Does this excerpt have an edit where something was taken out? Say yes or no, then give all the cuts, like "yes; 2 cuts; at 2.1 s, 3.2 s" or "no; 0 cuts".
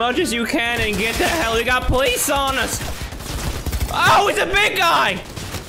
no; 0 cuts